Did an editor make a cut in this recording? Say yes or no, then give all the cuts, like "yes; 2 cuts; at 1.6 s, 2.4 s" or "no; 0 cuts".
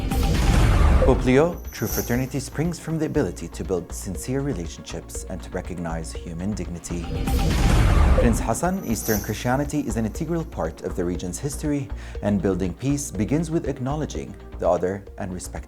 yes; 1 cut; at 0.9 s